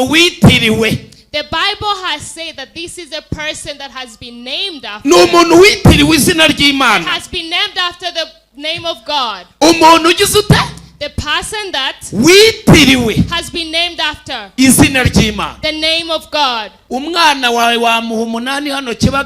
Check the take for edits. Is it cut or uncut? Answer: cut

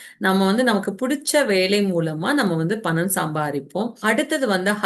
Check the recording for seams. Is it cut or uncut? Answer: cut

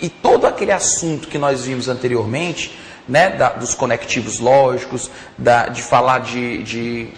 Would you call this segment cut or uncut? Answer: cut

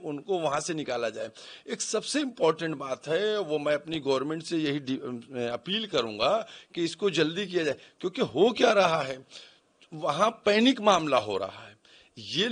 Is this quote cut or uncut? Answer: uncut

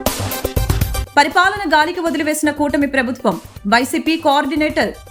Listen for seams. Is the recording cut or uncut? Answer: uncut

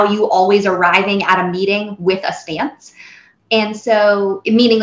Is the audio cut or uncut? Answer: cut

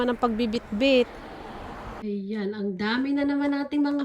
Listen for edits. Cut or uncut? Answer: cut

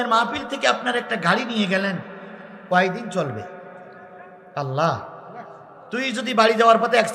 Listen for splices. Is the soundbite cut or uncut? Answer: uncut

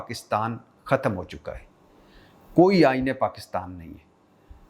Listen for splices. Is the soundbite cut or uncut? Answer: uncut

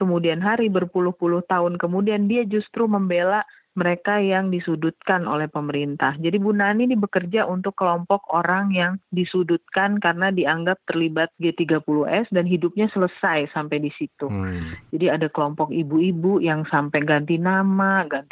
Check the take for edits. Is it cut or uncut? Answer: uncut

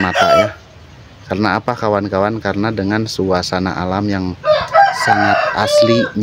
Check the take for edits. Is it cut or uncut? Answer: uncut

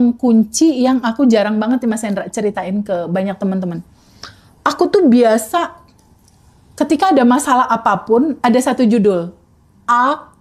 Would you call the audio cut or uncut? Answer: uncut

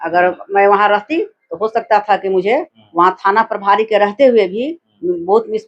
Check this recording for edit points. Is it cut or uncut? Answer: cut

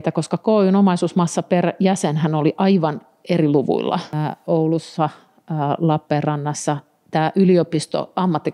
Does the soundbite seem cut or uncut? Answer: cut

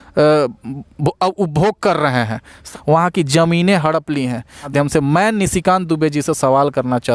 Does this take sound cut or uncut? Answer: cut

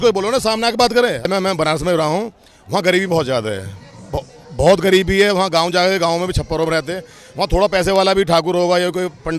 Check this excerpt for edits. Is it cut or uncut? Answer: cut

